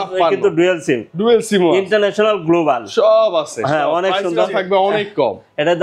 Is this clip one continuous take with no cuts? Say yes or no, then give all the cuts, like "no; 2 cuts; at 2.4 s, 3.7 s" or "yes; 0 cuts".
yes; 0 cuts